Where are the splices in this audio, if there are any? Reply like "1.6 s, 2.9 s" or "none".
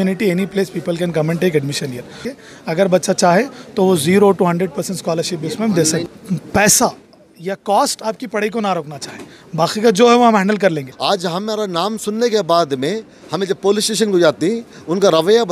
2.3 s, 6.1 s, 10.9 s